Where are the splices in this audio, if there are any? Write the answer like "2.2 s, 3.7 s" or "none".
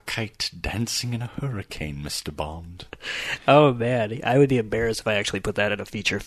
none